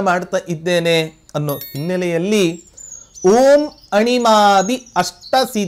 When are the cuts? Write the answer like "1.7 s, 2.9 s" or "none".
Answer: none